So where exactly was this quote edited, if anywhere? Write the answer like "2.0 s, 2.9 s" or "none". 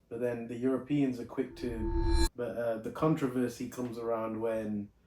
2.0 s